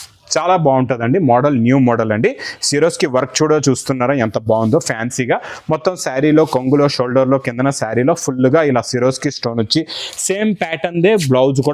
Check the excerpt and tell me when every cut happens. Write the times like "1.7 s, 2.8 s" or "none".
none

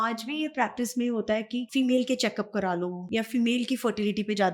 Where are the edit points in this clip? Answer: 1.7 s, 3.0 s

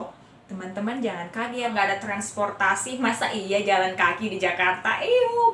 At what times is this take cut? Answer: 1.7 s

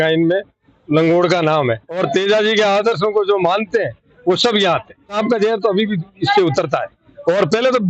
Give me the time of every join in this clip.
1.9 s, 5.2 s

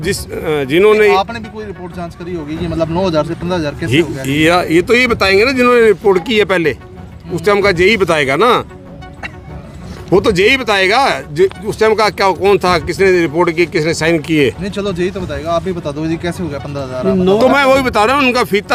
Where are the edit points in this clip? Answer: none

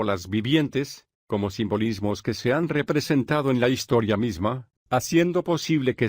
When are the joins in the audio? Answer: 4.6 s

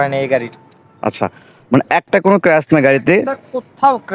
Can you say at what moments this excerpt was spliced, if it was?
none

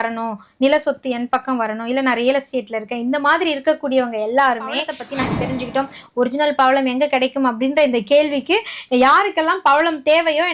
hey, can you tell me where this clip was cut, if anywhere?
5.0 s

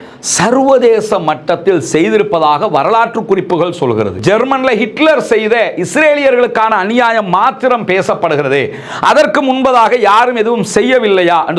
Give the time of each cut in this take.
4.2 s

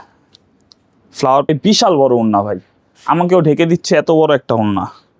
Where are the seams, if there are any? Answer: 1.5 s

